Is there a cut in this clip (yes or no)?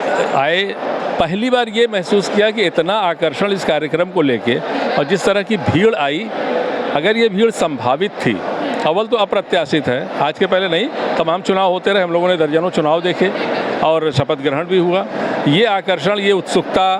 no